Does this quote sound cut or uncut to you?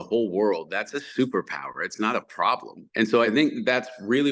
cut